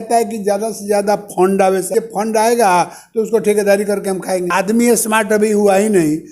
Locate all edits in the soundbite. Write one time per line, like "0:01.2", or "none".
0:01.9
0:04.5